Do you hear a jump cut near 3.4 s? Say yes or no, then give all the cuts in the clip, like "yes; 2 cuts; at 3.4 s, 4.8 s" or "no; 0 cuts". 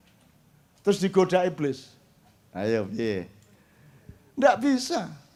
no; 0 cuts